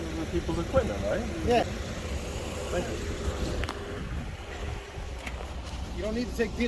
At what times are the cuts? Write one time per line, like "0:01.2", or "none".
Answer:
0:01.6